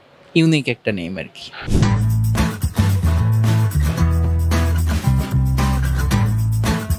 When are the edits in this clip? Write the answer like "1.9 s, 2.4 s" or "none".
1.5 s